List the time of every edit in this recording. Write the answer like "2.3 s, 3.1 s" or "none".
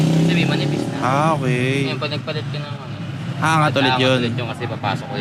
none

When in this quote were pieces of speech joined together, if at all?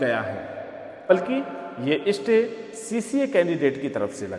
1.1 s

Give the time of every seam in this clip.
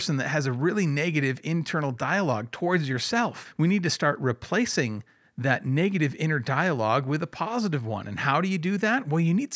3.4 s

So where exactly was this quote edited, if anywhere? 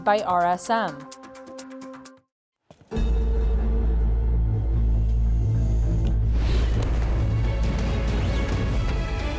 1.0 s, 2.1 s

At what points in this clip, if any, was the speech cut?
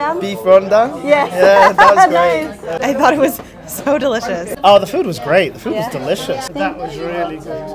2.8 s, 4.5 s, 6.5 s

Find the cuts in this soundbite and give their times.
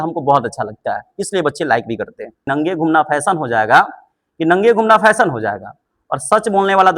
2.5 s

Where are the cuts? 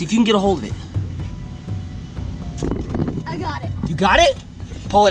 none

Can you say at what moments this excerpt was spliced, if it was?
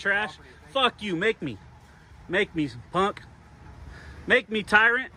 none

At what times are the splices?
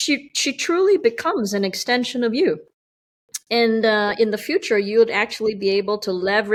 none

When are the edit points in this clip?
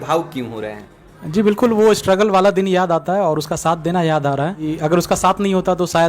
4.6 s

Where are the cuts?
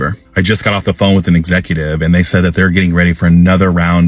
none

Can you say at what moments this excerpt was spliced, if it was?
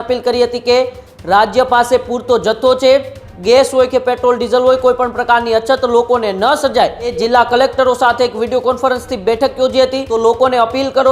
3.3 s, 7.1 s, 10.0 s

